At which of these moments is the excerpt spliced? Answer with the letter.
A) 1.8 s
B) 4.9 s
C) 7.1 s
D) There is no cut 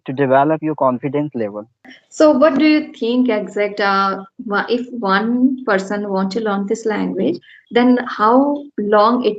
A